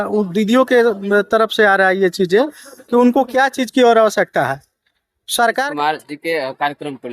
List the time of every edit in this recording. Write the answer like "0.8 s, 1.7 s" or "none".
5.6 s